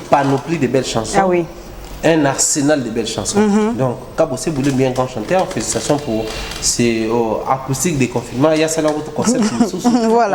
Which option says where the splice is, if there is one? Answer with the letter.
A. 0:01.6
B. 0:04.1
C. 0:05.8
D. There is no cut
D